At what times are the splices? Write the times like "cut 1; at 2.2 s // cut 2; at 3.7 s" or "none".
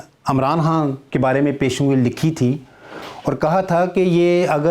cut 1; at 1.0 s

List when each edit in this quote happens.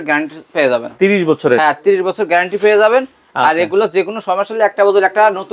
none

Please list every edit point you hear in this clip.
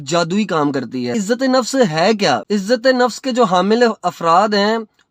cut 1; at 1.1 s // cut 2; at 2.4 s

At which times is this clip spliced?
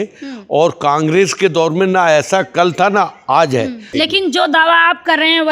cut 1; at 3.8 s

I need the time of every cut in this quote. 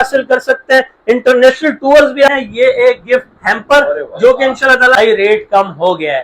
cut 1; at 2.3 s // cut 2; at 4.9 s

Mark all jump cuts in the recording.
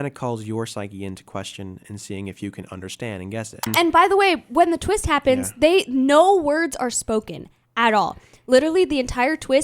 cut 1; at 3.7 s

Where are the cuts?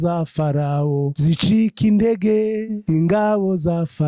cut 1; at 1.1 s // cut 2; at 2.7 s

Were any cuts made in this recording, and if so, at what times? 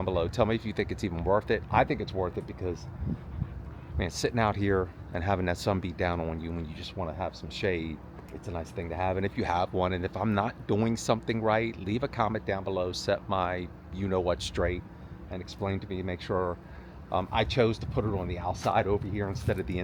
none

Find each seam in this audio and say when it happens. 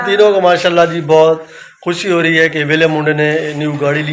none

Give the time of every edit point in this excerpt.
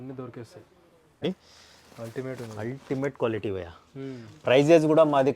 cut 1; at 1.2 s

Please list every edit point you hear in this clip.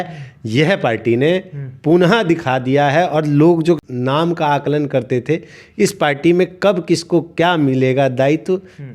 cut 1; at 3.9 s

